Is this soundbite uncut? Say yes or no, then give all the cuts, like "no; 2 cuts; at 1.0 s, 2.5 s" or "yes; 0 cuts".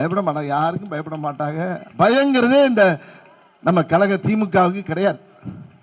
yes; 0 cuts